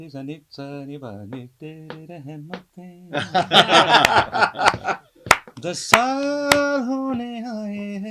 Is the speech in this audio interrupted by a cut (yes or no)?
no